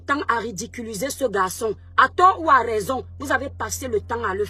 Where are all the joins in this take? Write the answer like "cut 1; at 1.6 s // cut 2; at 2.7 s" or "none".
none